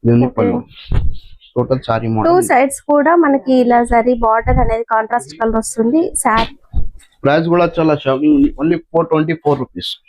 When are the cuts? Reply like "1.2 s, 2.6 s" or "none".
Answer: 6.4 s